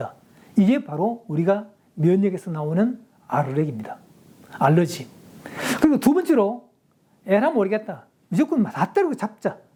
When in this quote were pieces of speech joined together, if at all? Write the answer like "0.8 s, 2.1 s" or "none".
none